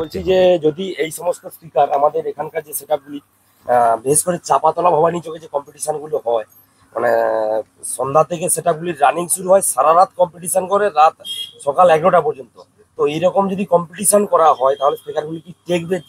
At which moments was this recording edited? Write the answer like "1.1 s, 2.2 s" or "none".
none